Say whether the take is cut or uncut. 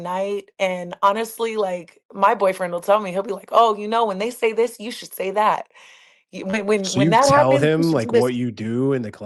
uncut